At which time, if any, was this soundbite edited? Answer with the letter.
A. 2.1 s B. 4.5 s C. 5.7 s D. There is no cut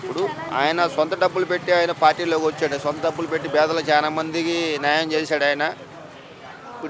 D